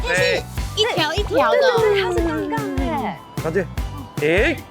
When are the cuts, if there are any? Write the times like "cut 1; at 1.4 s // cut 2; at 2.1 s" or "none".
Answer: cut 1; at 3.3 s